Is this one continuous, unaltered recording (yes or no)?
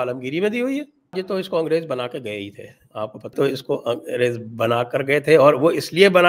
no